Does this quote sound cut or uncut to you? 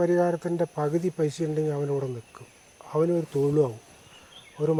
uncut